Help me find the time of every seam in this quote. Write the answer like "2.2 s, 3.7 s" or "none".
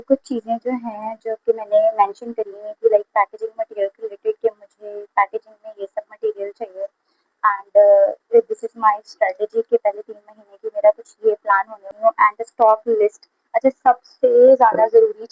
11.9 s